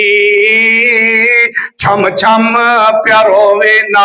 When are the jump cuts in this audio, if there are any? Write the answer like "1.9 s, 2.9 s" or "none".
none